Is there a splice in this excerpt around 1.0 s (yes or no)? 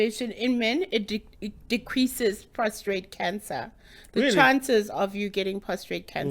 no